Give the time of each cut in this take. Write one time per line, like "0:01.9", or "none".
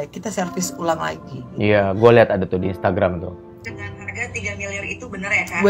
0:03.6